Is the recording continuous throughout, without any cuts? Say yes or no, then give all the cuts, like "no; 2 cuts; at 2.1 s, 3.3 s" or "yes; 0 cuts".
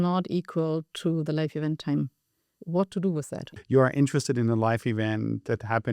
no; 1 cut; at 3.4 s